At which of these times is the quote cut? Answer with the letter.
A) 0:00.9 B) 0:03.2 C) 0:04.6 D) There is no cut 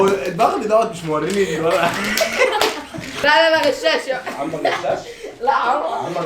B